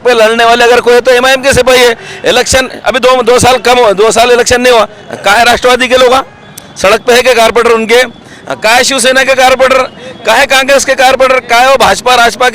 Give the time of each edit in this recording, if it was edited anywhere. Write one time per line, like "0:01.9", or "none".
none